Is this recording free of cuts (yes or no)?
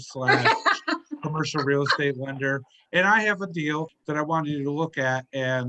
no